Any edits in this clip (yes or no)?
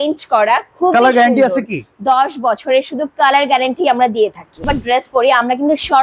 yes